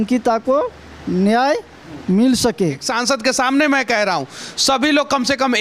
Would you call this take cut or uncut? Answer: cut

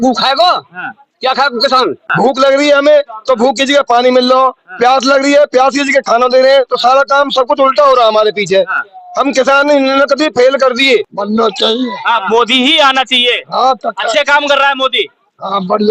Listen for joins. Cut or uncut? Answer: cut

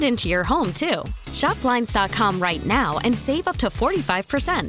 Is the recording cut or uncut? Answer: uncut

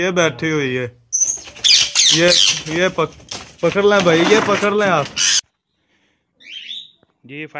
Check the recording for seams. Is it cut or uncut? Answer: cut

